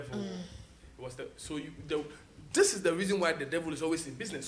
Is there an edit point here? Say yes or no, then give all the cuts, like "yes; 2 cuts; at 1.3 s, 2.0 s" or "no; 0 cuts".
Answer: no; 0 cuts